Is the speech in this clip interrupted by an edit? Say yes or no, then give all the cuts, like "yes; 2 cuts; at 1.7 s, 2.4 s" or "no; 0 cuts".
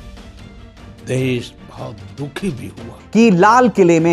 yes; 1 cut; at 3.0 s